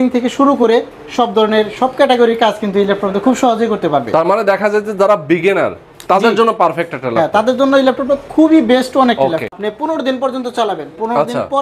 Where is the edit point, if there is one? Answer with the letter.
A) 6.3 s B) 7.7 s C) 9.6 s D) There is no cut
C